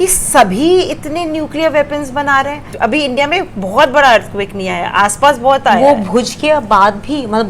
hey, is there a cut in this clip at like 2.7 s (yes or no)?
yes